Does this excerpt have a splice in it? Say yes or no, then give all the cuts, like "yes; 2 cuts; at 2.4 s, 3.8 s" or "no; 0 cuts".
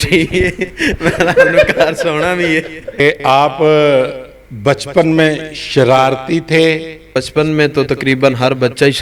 yes; 2 cuts; at 3.0 s, 7.2 s